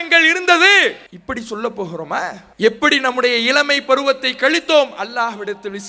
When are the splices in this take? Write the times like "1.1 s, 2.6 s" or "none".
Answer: 1.1 s, 2.4 s